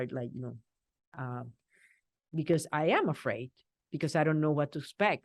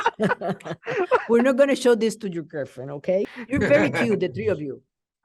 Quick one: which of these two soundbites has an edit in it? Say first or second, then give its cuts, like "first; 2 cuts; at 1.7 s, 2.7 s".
second; 1 cut; at 3.3 s